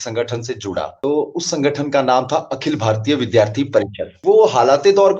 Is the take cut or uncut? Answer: uncut